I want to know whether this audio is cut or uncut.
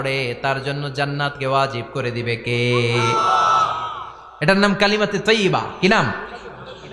uncut